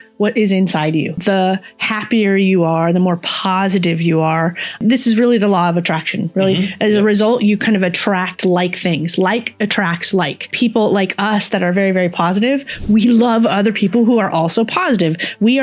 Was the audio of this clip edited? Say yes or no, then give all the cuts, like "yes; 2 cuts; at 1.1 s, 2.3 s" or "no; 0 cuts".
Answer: yes; 3 cuts; at 1.2 s, 4.8 s, 10.5 s